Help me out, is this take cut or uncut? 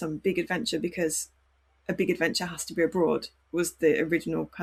uncut